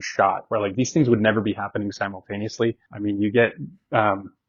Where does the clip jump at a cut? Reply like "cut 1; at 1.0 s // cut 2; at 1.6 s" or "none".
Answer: cut 1; at 2.9 s